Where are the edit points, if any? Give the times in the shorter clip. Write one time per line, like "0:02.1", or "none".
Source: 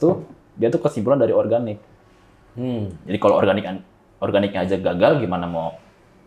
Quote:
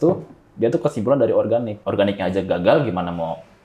0:01.7